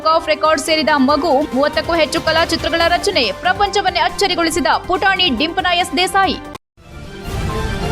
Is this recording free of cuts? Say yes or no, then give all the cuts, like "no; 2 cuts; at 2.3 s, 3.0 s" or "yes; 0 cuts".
no; 1 cut; at 6.5 s